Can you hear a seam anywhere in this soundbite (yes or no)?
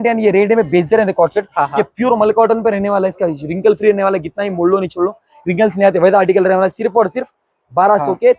no